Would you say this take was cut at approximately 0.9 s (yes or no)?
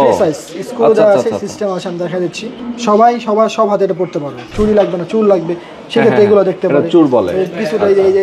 no